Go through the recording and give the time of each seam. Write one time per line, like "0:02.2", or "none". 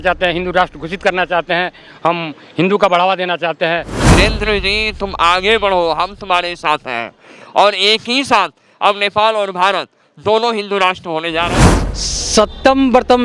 0:04.2
0:11.6